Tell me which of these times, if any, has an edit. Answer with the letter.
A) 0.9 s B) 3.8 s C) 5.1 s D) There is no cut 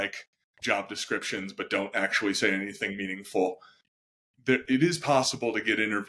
B